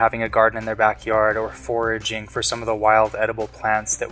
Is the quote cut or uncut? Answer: uncut